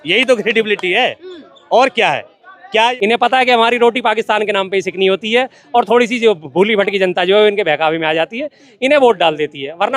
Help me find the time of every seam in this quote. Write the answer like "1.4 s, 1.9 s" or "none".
2.9 s